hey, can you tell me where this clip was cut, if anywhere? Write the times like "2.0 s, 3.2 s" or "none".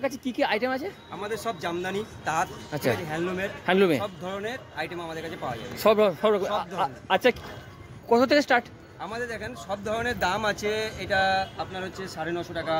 none